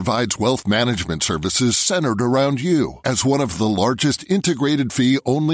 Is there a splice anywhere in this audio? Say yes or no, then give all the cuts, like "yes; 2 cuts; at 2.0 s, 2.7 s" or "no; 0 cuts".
no; 0 cuts